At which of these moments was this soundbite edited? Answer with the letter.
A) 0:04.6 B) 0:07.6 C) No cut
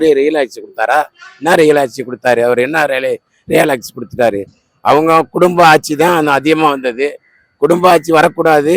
C